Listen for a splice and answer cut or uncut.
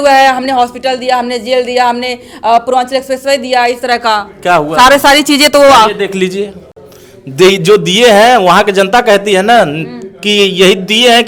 uncut